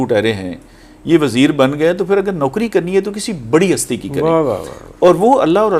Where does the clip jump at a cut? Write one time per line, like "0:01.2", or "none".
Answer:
none